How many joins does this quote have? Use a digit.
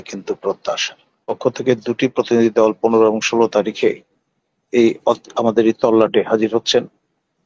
1